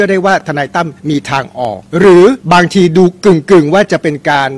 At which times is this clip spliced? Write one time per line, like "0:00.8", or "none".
0:01.0
0:01.8
0:02.4

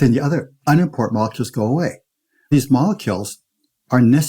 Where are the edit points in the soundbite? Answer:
0:02.5

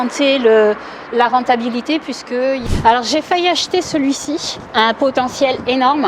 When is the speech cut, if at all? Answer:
0:02.6
0:04.5

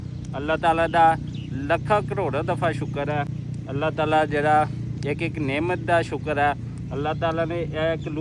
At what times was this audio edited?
none

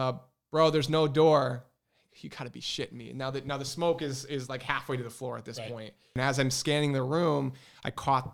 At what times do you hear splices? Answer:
0:06.1

